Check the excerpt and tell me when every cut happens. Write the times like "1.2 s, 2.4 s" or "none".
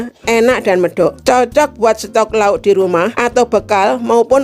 1.2 s, 3.2 s